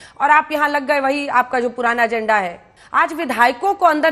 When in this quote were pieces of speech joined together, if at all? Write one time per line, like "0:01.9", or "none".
0:02.8